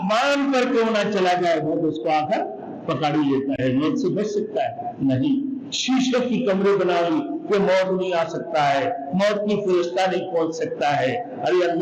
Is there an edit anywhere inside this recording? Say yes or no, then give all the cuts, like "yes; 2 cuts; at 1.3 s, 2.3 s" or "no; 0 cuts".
no; 0 cuts